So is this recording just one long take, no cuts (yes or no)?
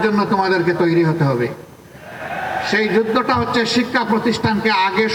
yes